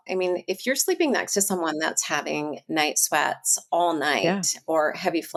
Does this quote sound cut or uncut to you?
uncut